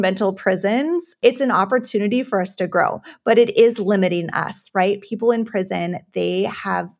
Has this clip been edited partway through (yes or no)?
yes